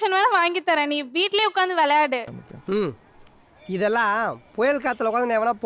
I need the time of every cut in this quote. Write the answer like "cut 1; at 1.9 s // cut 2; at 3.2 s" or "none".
cut 1; at 2.3 s

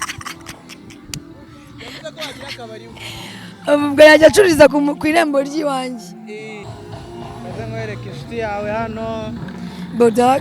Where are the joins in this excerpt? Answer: cut 1; at 6.6 s

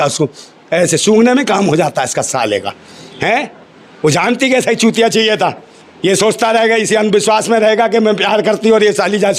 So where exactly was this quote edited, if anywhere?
none

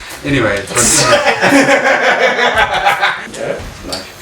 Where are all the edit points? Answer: cut 1; at 3.2 s

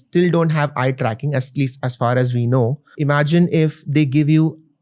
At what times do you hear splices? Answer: cut 1; at 2.9 s

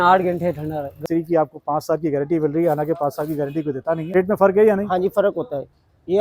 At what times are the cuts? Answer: cut 1; at 1.0 s // cut 2; at 4.1 s

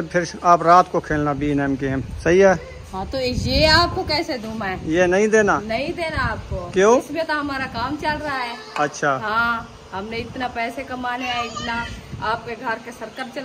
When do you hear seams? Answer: none

